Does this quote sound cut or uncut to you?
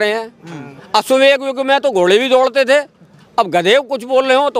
uncut